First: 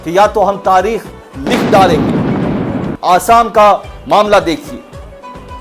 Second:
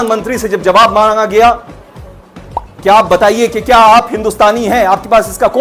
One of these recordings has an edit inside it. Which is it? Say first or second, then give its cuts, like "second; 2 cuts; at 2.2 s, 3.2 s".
first; 1 cut; at 2.9 s